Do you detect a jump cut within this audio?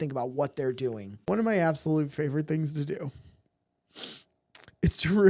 yes; 1 cut; at 1.1 s

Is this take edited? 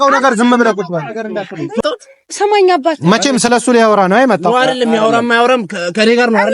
yes; 1 cut; at 1.8 s

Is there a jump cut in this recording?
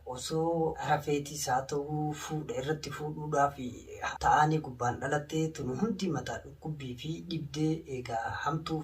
yes; 2 cuts; at 0.9 s, 3.9 s

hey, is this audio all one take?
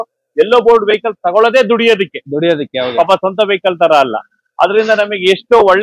yes; 0 cuts

